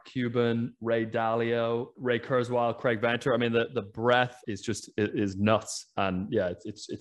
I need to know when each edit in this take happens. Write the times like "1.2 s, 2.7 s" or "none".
1.9 s, 4.4 s